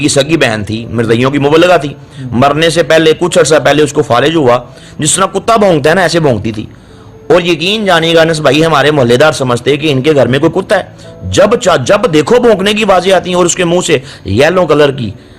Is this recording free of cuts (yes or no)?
yes